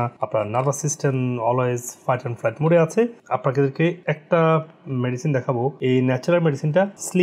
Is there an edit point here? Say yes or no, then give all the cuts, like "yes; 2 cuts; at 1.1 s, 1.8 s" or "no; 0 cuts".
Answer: no; 0 cuts